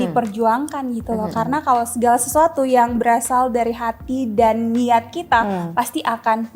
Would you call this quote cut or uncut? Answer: uncut